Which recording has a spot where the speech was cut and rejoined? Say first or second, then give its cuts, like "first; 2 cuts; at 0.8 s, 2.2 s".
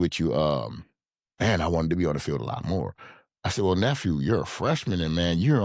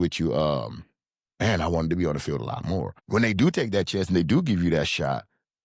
second; 1 cut; at 3.0 s